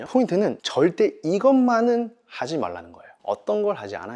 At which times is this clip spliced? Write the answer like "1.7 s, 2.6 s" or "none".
none